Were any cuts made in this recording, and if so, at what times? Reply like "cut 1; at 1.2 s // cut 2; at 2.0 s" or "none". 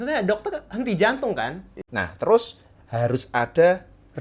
cut 1; at 1.7 s